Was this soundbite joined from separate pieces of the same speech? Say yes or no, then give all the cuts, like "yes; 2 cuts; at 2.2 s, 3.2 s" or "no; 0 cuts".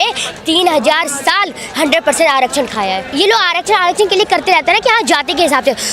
yes; 1 cut; at 3.1 s